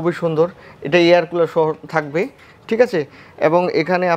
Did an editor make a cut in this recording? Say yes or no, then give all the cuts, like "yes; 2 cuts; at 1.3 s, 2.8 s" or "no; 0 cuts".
no; 0 cuts